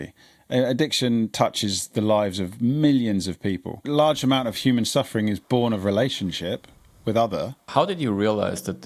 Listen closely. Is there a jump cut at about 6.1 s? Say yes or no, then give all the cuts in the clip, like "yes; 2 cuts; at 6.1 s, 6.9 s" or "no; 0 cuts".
no; 2 cuts; at 3.9 s, 7.6 s